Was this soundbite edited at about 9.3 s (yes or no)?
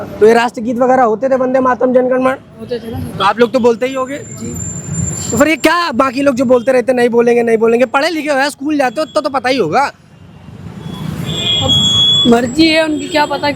no